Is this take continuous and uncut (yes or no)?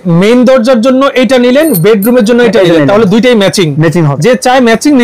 no